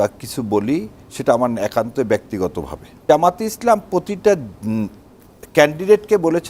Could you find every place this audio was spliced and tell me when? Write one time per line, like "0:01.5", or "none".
0:03.0